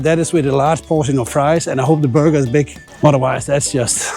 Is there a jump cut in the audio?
yes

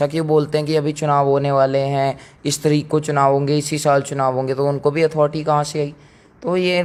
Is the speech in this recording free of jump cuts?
yes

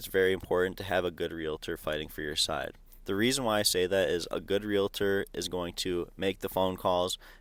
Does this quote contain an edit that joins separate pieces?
no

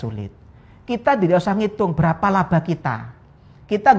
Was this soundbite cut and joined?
no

